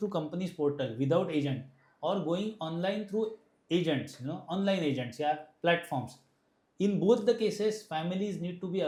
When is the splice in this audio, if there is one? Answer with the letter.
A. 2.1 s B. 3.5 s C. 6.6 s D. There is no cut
D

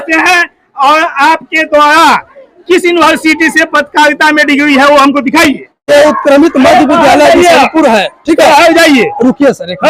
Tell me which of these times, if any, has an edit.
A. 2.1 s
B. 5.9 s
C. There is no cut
B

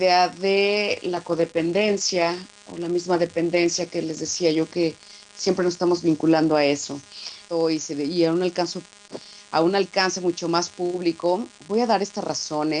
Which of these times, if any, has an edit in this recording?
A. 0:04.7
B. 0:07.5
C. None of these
C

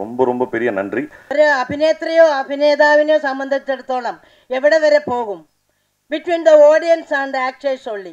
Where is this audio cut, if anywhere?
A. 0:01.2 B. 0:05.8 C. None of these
A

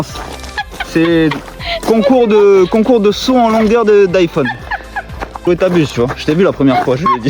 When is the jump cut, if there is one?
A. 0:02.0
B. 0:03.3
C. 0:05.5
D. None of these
C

